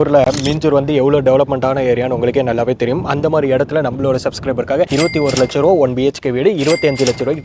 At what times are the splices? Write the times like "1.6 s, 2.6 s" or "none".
none